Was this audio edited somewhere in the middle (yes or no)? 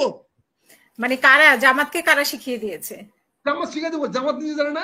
no